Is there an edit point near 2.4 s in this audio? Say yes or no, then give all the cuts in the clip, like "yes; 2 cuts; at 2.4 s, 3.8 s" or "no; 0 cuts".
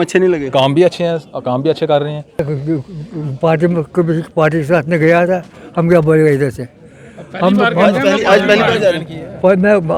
yes; 1 cut; at 2.4 s